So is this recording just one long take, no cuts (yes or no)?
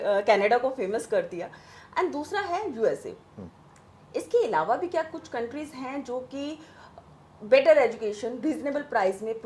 yes